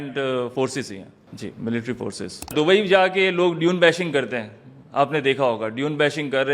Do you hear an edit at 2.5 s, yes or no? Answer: yes